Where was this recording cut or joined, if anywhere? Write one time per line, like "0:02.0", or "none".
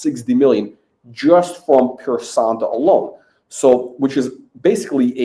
none

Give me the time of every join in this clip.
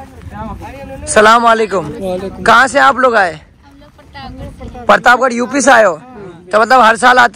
none

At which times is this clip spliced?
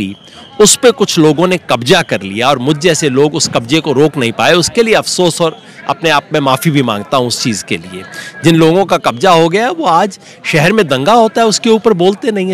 none

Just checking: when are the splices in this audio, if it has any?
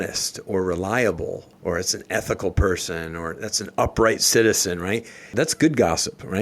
0:01.4
0:05.3

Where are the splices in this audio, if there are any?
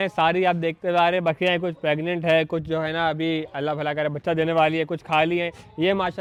none

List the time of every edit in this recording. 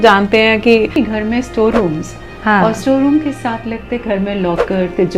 0:00.9

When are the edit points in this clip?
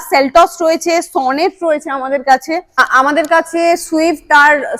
0:02.8

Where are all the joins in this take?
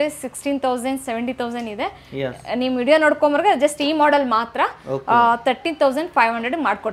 none

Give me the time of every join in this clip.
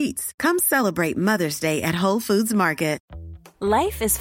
0:03.0

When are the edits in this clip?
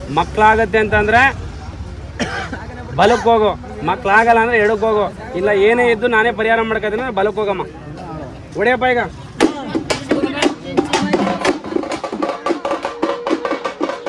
0:12.0

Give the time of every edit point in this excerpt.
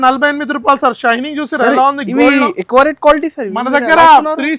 none

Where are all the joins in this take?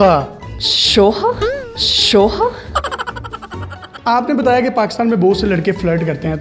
0:03.8

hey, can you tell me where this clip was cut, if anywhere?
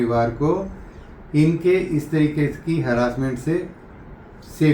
none

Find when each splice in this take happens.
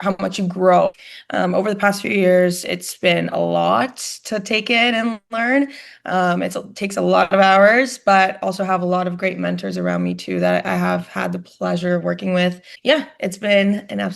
0:01.0
0:12.7

